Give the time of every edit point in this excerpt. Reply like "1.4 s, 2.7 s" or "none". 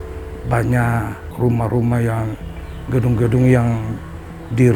1.3 s